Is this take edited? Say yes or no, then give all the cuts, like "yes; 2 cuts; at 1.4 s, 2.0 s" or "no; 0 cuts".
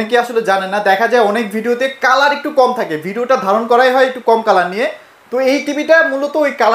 no; 0 cuts